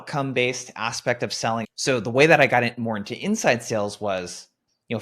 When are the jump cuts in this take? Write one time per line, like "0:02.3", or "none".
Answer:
0:01.7